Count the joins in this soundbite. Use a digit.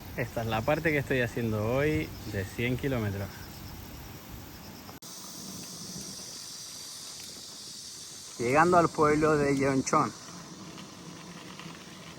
0